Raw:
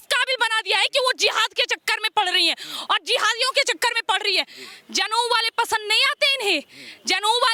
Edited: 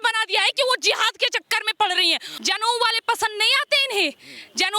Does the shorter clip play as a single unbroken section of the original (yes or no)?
no